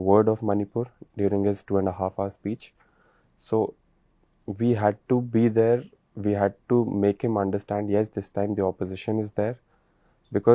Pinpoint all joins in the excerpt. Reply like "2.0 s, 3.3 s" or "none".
none